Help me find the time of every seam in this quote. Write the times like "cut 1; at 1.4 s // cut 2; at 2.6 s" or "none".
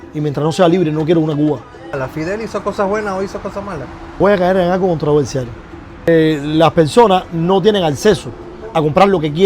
cut 1; at 1.9 s // cut 2; at 4.0 s // cut 3; at 6.1 s